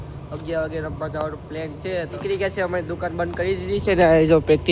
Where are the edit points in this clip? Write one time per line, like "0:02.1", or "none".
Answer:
0:02.2